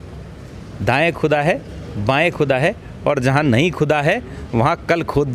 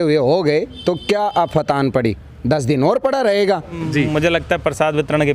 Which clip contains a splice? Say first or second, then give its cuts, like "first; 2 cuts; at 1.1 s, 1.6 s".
second; 1 cut; at 3.8 s